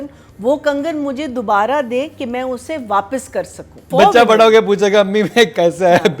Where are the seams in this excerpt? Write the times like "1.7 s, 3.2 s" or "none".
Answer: 3.8 s